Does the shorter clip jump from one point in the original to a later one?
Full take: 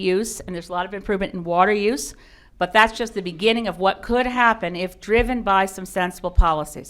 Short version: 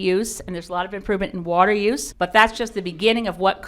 yes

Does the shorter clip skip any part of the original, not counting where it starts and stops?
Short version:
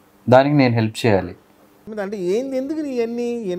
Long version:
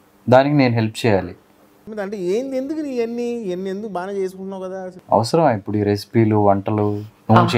no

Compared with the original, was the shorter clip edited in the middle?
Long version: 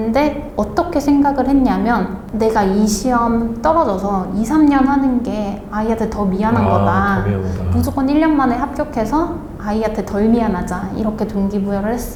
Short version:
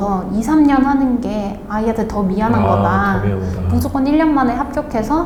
no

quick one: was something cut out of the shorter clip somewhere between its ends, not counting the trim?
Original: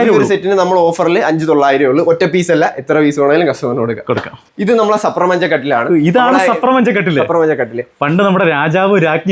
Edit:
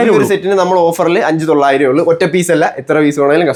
no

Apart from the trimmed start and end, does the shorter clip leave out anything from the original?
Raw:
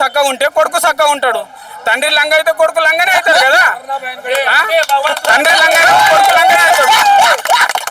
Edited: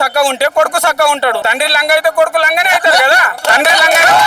yes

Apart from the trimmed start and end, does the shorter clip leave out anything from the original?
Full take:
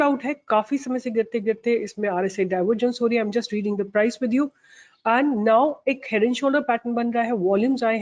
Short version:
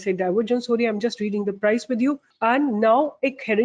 yes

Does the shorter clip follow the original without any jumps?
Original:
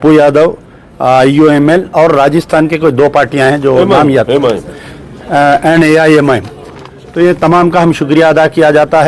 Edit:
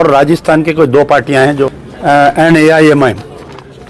no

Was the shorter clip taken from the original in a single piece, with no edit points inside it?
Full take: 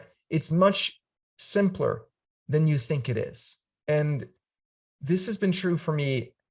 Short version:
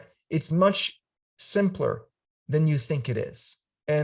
yes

